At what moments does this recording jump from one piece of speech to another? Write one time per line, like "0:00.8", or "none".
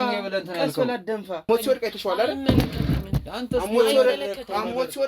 0:01.4